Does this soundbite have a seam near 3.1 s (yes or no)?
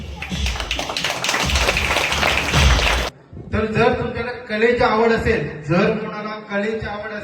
yes